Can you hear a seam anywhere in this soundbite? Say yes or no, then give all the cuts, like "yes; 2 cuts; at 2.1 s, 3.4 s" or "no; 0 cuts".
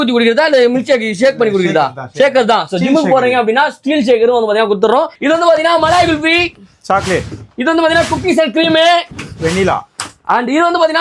yes; 1 cut; at 5.1 s